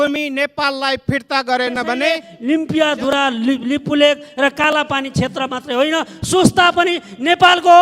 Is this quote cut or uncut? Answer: cut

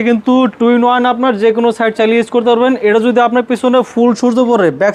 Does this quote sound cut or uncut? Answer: uncut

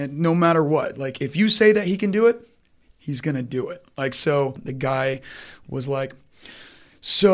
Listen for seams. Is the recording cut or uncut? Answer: cut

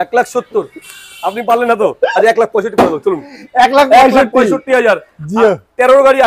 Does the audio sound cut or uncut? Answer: uncut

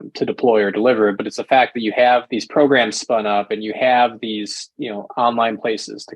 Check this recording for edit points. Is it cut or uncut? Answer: cut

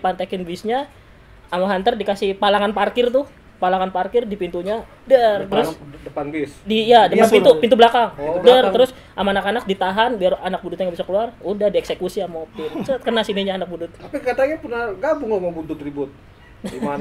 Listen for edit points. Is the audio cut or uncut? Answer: cut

